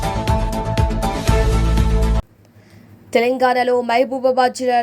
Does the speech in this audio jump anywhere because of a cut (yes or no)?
yes